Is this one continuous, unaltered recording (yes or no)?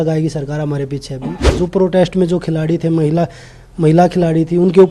no